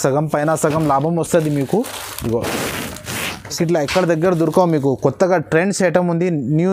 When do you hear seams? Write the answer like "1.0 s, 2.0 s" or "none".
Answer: 3.6 s